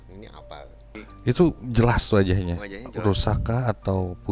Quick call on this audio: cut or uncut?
cut